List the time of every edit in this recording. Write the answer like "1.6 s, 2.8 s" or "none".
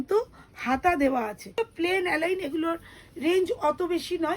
1.6 s